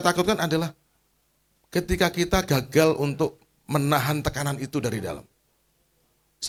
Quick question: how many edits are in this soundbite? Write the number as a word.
zero